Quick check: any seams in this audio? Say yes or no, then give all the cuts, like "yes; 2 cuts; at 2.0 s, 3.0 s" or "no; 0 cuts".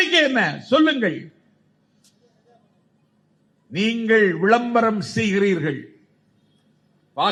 no; 0 cuts